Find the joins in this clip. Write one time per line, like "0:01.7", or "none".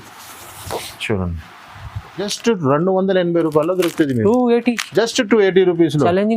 0:02.3